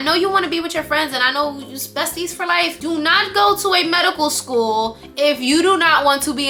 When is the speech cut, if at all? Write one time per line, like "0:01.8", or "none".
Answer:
none

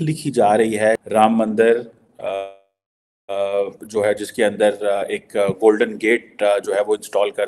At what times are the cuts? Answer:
0:01.0

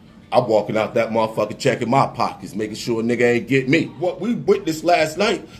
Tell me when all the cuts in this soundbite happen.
0:04.4

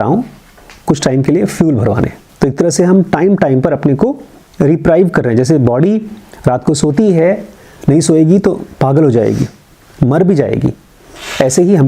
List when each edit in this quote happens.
0:02.2

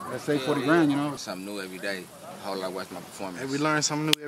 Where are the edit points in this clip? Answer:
0:01.1

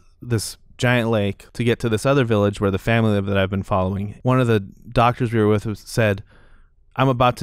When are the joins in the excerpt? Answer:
0:01.4
0:04.1

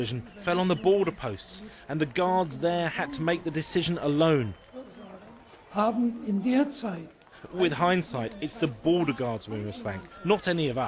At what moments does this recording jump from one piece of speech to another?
0:08.6

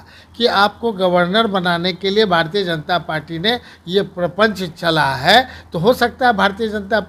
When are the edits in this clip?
none

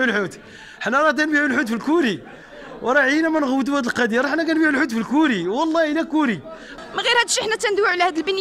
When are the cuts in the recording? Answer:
0:06.6

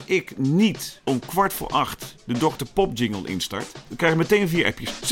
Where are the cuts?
0:00.9
0:03.9

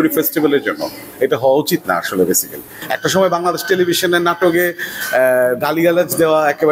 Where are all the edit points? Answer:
0:02.8

